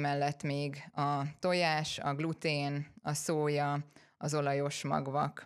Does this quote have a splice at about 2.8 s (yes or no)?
no